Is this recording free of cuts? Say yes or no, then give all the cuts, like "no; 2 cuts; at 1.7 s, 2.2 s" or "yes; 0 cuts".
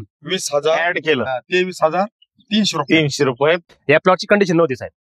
no; 1 cut; at 3.6 s